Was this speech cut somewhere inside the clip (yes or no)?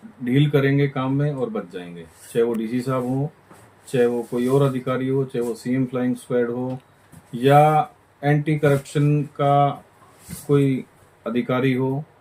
no